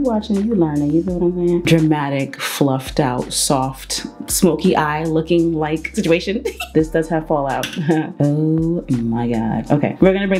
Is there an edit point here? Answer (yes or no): yes